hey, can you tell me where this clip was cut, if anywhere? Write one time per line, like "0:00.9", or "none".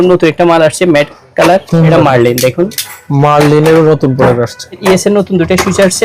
0:01.9
0:04.8

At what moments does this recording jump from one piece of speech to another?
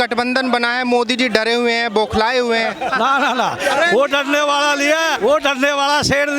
0:05.1

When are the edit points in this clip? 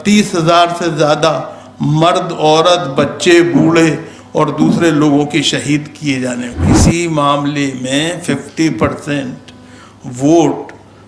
0:06.7

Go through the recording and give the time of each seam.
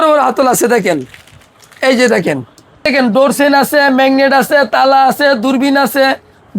0:02.9

